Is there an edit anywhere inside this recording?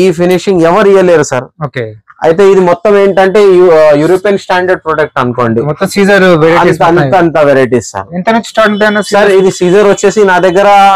no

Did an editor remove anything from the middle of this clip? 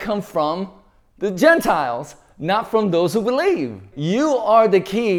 no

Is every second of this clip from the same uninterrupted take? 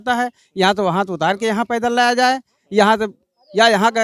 yes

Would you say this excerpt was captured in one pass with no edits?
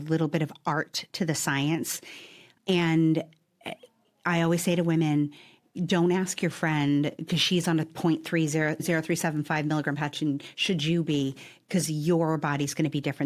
no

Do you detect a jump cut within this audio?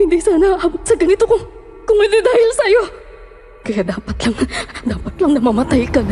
yes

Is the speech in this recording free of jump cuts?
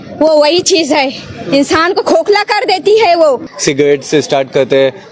no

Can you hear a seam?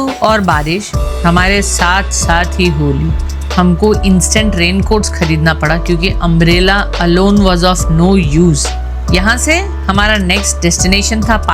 no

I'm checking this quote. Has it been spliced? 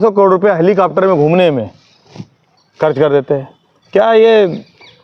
no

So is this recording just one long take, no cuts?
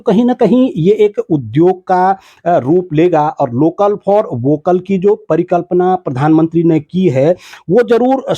yes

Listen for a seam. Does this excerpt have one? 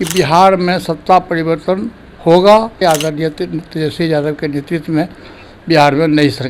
yes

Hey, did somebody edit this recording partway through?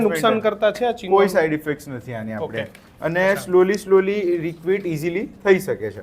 no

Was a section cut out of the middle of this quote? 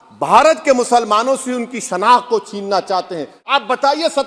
yes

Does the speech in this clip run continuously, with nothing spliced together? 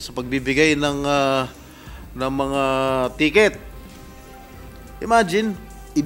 no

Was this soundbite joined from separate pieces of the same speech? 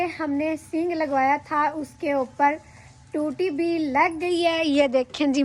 no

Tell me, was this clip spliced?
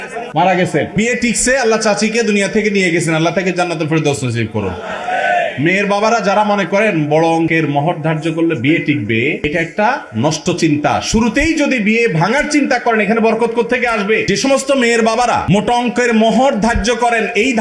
yes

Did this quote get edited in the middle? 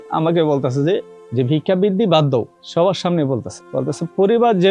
yes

